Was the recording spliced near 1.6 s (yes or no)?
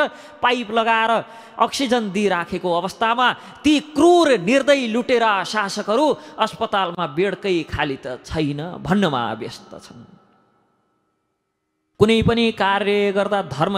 no